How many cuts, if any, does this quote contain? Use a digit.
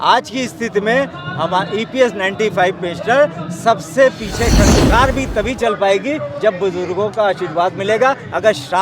1